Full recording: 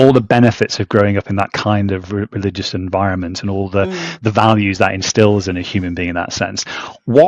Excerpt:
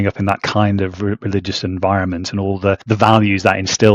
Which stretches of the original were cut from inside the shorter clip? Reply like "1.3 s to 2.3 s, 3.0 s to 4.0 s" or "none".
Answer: 3.9 s to 4.2 s